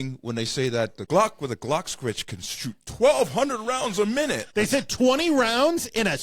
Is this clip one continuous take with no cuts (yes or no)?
no